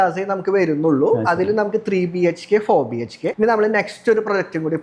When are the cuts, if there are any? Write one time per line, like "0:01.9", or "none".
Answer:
0:03.2